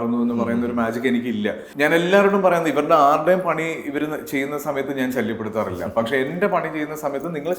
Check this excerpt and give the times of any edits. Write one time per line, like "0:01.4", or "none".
0:01.6